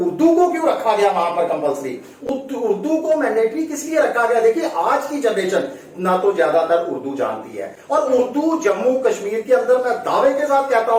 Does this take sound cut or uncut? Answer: uncut